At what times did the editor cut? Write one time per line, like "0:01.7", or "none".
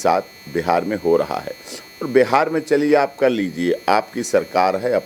none